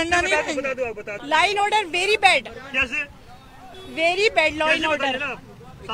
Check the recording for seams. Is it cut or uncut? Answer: cut